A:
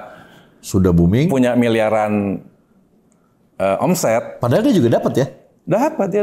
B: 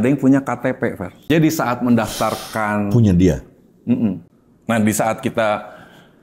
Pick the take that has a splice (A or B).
B